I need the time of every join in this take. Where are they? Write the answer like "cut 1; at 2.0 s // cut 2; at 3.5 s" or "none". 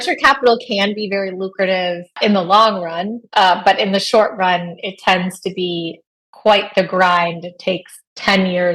cut 1; at 2.2 s